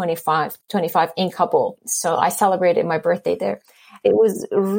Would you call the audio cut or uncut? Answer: cut